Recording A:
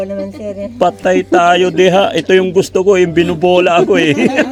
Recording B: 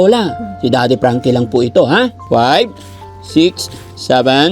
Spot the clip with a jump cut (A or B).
B